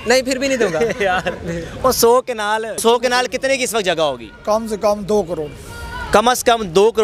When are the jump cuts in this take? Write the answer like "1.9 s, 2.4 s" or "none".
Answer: 2.7 s